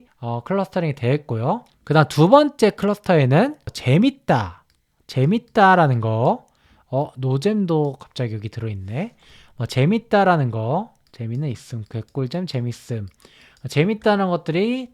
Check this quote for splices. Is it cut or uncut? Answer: cut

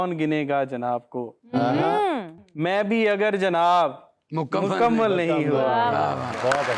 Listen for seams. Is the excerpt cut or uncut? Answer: uncut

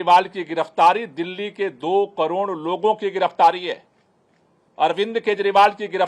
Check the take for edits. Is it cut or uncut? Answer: uncut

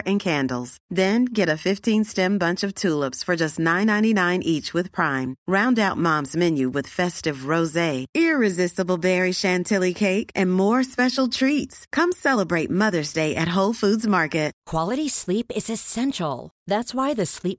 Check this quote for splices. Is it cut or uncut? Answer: cut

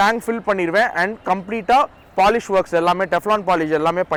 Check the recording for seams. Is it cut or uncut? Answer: uncut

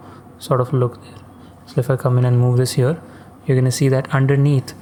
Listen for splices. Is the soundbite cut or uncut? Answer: uncut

